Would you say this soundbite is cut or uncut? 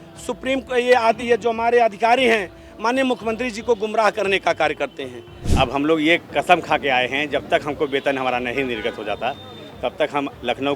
cut